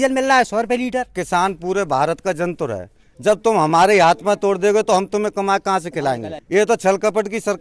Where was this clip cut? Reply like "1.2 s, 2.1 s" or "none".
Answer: 1.2 s, 6.3 s